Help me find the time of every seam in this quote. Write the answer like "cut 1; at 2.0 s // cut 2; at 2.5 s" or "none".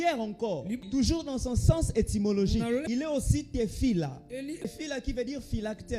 cut 1; at 0.8 s // cut 2; at 3.0 s // cut 3; at 4.7 s